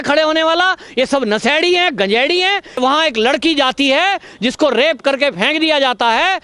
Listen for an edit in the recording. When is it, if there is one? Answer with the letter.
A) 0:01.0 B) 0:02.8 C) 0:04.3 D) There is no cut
B